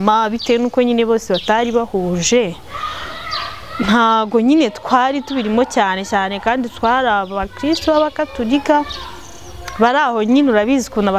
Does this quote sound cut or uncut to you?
uncut